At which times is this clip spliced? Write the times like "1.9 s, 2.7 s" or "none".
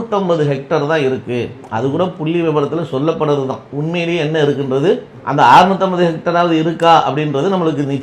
5.1 s